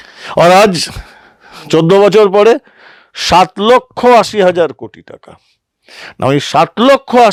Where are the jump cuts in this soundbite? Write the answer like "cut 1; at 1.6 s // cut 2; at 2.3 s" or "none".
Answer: none